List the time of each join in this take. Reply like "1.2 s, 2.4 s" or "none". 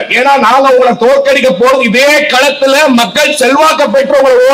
none